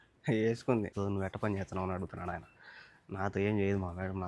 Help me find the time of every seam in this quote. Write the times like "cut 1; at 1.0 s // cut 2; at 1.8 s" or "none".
cut 1; at 0.9 s